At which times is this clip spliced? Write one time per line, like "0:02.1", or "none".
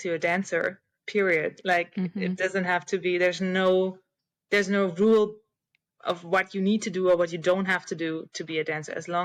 none